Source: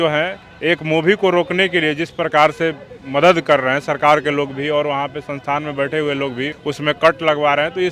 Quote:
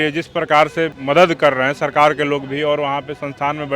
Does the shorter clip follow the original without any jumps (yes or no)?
no